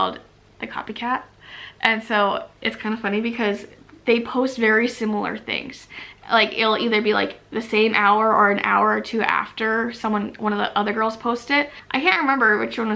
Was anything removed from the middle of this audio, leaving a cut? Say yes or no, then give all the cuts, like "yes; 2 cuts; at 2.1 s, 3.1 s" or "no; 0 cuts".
no; 0 cuts